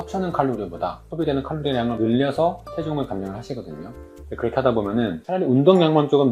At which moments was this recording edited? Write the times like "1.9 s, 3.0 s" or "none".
none